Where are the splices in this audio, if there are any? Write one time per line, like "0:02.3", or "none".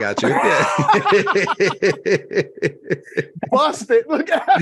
none